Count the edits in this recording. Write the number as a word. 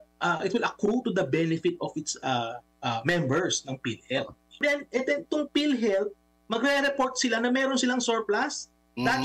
one